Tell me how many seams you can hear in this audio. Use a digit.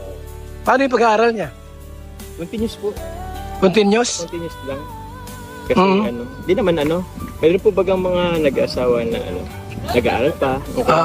0